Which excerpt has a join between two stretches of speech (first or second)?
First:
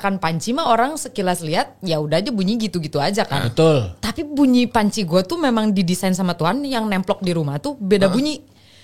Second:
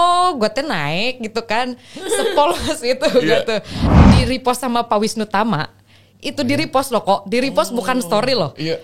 second